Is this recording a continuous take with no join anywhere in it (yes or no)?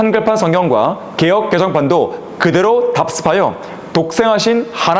yes